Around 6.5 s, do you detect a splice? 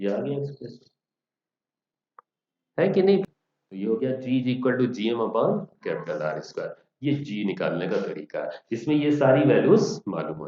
no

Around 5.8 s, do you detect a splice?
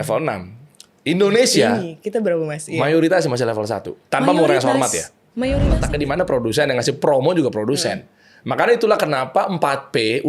yes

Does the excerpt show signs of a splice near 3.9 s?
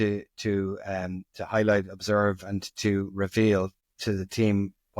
yes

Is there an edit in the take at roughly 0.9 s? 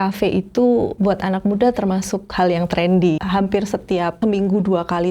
yes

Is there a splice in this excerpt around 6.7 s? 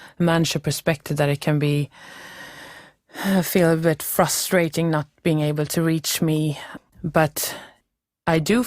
yes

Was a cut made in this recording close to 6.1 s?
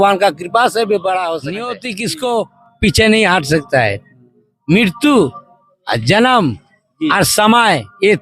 no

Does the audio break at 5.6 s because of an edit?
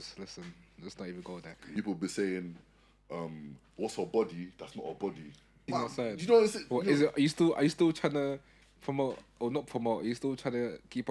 yes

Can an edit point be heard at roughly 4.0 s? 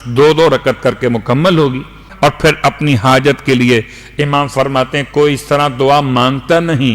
no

